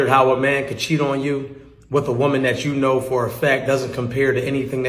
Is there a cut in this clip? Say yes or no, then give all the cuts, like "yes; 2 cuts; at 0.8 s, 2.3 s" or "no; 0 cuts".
no; 0 cuts